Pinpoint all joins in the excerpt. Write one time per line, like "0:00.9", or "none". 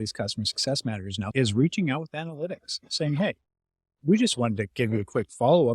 0:01.2

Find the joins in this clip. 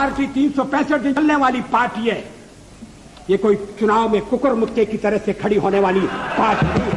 0:01.2

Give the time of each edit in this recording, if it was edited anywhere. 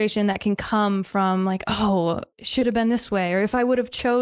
0:02.3

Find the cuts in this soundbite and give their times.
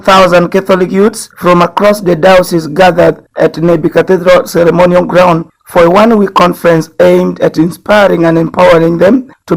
none

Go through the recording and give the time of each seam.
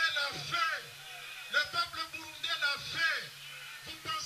none

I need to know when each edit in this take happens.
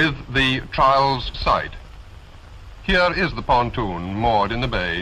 0:01.0

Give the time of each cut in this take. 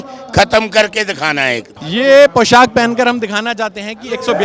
0:01.7

